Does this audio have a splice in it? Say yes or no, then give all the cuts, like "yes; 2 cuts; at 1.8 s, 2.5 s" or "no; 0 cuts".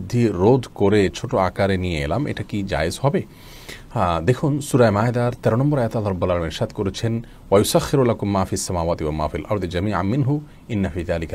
no; 0 cuts